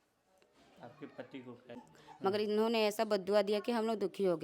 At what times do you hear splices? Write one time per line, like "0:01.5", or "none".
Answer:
0:01.8